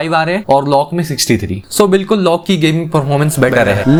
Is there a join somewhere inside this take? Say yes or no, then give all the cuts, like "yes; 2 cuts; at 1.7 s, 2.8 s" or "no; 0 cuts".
no; 0 cuts